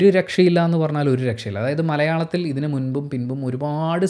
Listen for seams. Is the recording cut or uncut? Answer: uncut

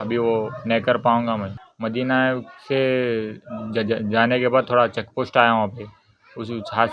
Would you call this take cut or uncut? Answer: cut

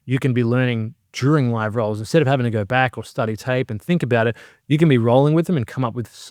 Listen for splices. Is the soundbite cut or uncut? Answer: uncut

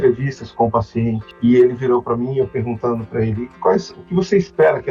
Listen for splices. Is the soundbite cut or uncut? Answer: cut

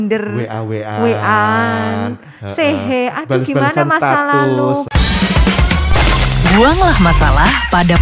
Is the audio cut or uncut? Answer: cut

